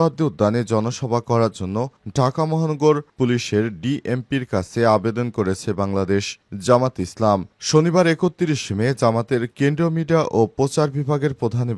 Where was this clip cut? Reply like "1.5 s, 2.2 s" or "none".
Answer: none